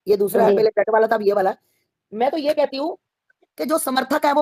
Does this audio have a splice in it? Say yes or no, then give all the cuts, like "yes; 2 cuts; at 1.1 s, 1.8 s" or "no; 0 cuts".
no; 0 cuts